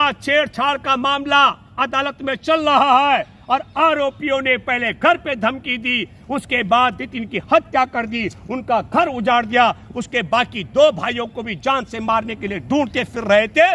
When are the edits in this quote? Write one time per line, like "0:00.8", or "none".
none